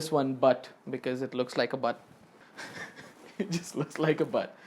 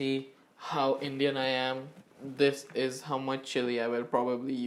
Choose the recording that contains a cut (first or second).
first